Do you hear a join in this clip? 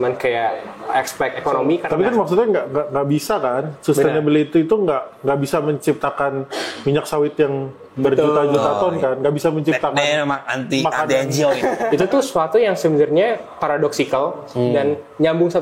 yes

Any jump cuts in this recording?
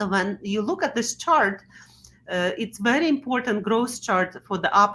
no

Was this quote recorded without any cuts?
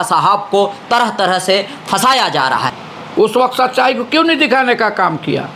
no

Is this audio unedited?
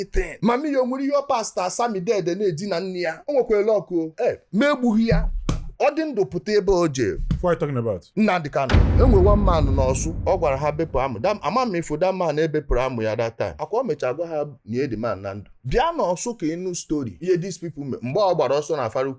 no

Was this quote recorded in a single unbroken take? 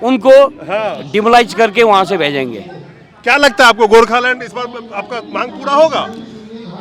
yes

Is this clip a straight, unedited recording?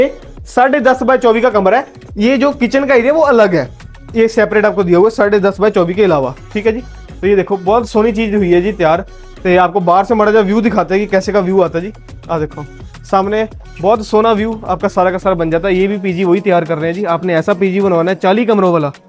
yes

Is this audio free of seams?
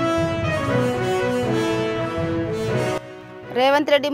no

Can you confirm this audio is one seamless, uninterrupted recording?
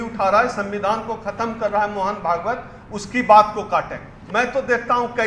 no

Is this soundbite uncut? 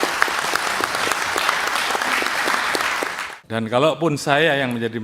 no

